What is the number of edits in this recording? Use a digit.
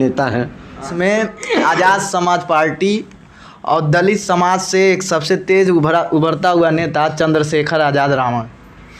1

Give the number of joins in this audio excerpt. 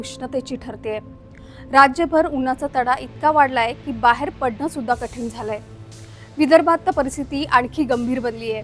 1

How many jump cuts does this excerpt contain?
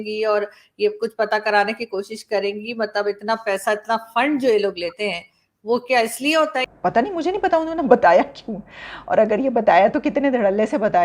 1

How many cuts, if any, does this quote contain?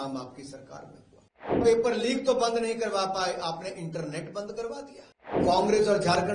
2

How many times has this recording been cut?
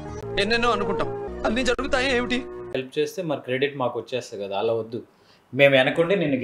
1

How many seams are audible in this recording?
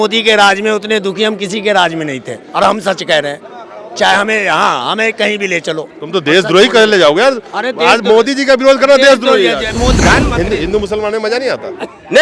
1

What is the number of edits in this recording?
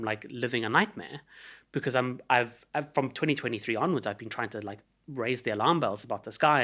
0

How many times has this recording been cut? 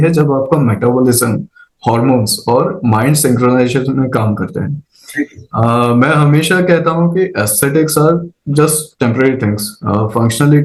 0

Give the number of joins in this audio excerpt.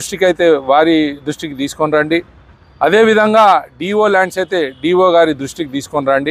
0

